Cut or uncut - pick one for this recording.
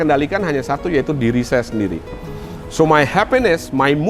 uncut